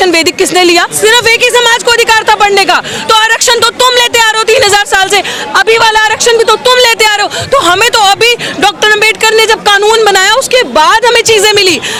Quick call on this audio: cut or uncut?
uncut